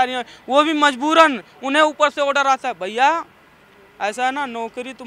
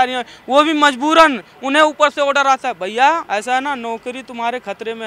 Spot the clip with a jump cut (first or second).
second